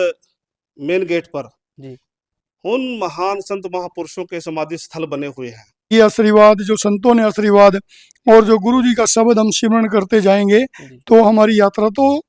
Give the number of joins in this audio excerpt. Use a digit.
1